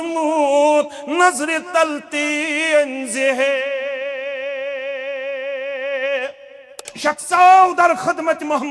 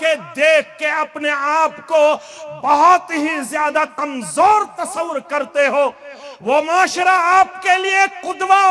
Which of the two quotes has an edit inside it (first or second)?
first